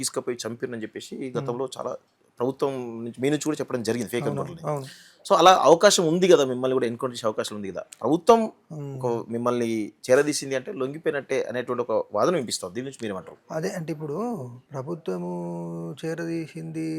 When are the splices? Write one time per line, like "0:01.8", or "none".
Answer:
0:14.6